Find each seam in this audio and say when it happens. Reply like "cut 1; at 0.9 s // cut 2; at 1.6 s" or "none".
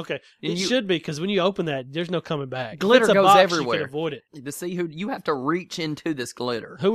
cut 1; at 4.3 s